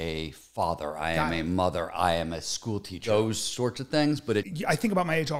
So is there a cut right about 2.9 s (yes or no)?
yes